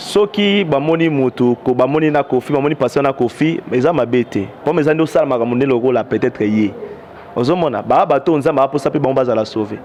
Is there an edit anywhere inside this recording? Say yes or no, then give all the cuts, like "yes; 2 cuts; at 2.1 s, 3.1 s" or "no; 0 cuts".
no; 0 cuts